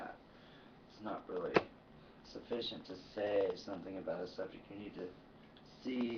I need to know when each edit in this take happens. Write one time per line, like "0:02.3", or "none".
0:04.3

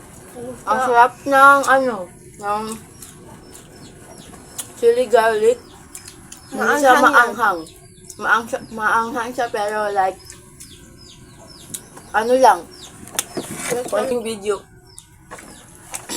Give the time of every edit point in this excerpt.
0:14.1

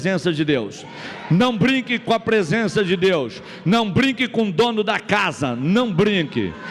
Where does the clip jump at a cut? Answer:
none

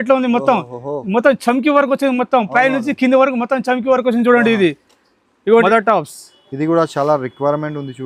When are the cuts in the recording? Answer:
0:05.6

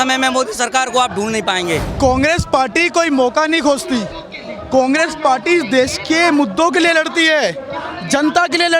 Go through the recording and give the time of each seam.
0:01.9

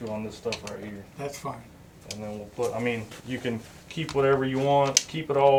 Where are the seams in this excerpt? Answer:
none

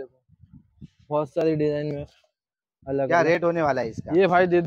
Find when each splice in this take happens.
none

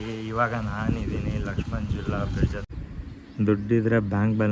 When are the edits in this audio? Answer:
0:02.6

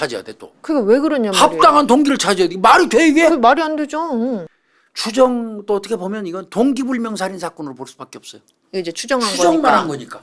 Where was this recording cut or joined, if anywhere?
0:04.5

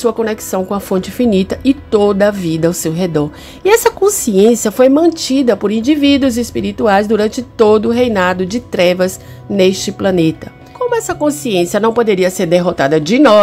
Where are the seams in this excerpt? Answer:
none

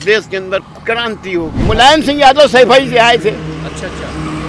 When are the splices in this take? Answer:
0:01.6

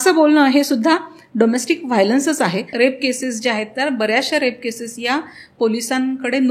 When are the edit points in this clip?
0:02.7

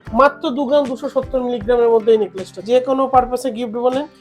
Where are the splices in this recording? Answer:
0:02.6

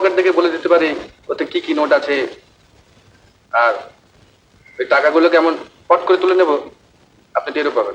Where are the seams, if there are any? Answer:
none

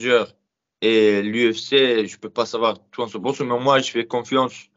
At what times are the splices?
none

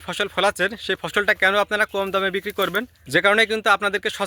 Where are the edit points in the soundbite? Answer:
0:03.0

